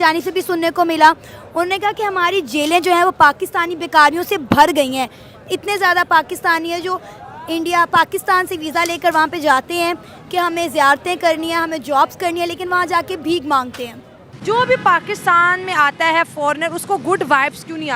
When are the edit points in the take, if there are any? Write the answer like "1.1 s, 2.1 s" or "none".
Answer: 14.3 s